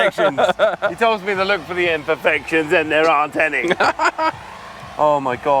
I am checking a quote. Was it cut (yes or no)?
no